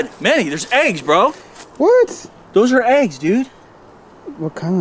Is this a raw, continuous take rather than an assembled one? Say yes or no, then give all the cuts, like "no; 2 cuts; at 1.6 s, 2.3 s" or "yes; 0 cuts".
yes; 0 cuts